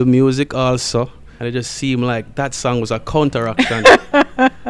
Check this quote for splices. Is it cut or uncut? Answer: cut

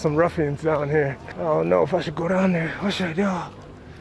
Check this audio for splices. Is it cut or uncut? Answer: cut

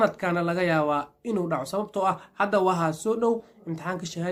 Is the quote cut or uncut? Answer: uncut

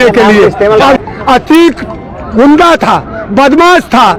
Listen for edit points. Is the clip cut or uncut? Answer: cut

